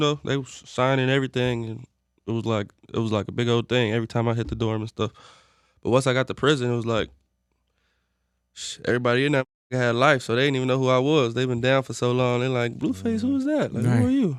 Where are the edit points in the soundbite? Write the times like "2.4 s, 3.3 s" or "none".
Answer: none